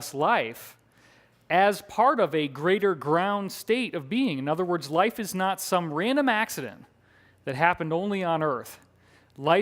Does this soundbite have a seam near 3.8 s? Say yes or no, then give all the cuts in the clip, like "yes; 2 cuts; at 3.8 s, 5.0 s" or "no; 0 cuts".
no; 1 cut; at 8.0 s